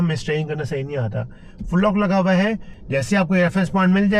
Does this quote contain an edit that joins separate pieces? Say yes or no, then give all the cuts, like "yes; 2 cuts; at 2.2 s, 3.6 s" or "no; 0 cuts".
yes; 1 cut; at 2.7 s